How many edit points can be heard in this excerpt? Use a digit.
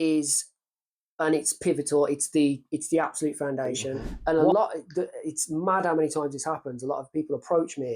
1